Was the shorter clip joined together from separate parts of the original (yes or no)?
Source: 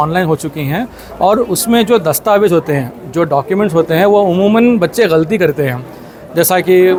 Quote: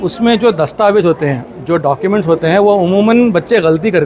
no